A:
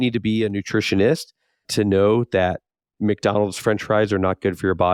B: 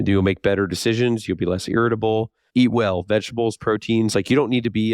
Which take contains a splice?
B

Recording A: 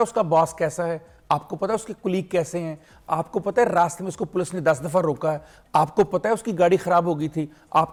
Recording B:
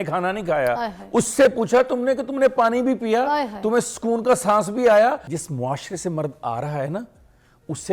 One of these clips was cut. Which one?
B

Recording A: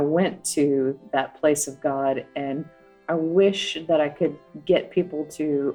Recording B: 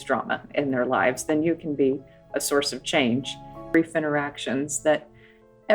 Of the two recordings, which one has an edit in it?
B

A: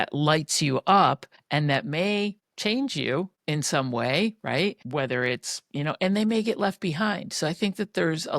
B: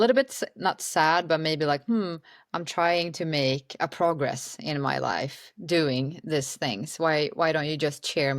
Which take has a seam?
A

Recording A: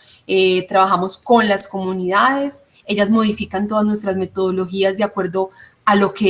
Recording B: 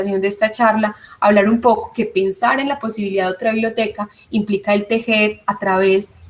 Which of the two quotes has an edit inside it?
A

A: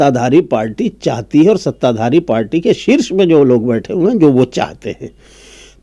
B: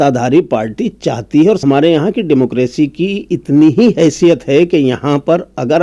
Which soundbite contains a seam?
B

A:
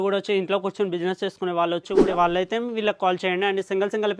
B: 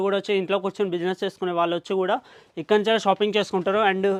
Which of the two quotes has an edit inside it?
A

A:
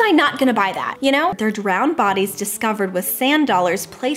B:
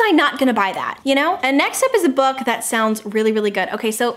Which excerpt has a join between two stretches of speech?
A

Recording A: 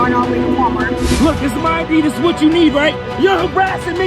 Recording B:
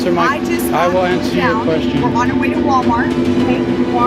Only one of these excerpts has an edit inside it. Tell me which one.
A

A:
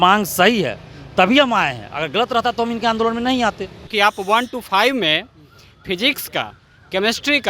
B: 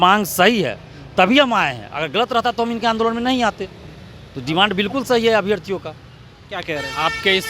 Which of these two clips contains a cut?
A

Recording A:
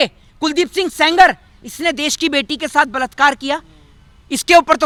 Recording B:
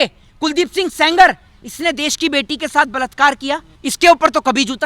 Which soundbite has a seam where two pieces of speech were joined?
B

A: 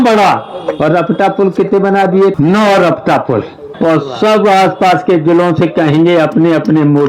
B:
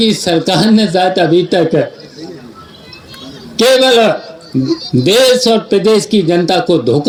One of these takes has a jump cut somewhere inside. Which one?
A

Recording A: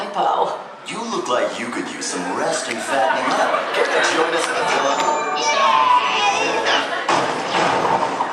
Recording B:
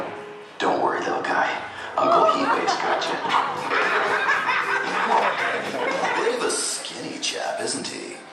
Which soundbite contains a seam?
B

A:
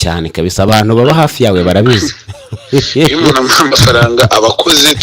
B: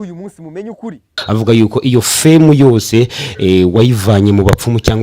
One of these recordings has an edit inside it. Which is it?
B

